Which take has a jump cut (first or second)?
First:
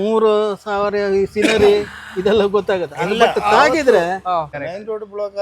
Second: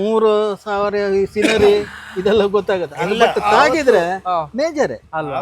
first